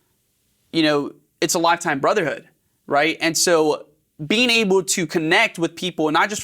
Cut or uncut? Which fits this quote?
uncut